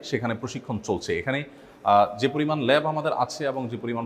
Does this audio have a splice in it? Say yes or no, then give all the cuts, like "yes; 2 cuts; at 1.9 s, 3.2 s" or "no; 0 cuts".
no; 0 cuts